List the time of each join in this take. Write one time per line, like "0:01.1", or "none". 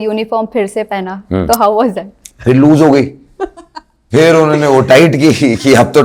none